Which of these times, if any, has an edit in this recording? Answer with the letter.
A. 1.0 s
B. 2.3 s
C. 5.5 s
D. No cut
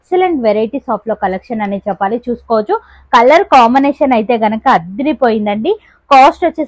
D